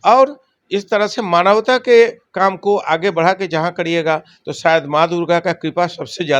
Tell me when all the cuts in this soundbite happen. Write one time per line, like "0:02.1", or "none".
none